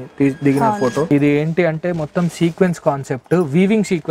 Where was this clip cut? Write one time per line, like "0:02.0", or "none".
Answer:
0:01.1